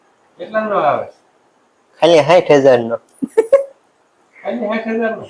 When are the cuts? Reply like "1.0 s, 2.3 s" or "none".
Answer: none